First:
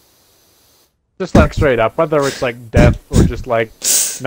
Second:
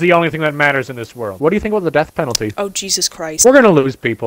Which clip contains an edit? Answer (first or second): second